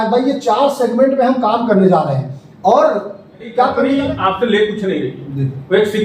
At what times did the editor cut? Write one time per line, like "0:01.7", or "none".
0:03.8